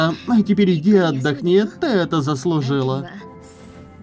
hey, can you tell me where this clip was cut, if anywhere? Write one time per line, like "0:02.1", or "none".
none